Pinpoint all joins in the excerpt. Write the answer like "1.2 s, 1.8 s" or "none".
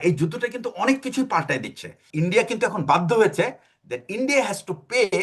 2.0 s